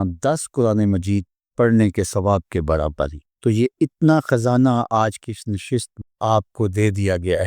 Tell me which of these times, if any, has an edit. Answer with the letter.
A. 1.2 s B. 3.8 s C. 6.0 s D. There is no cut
C